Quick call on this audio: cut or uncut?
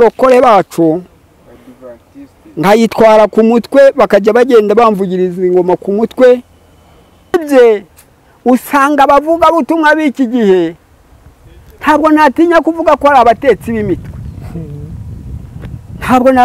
cut